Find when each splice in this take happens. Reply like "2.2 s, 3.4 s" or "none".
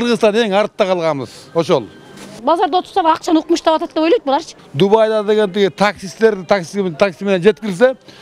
2.3 s, 4.6 s

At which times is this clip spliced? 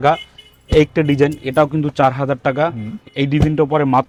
none

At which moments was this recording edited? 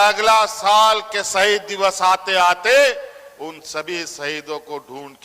none

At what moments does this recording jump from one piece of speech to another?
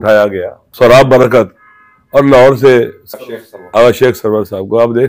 3.0 s

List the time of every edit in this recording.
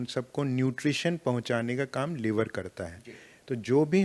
none

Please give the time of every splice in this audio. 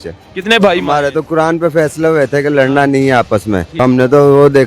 3.7 s

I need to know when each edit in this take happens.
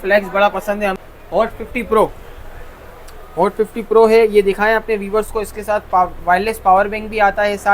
1.0 s

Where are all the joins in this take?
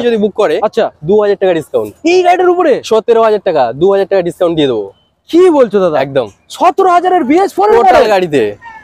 none

